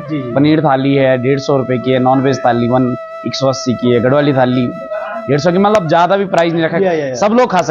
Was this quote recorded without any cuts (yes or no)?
yes